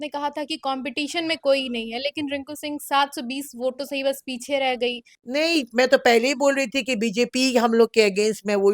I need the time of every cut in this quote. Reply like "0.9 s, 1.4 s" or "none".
5.1 s